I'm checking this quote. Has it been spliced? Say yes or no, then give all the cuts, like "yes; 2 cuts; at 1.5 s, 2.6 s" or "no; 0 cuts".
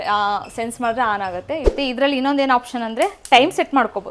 yes; 1 cut; at 1.7 s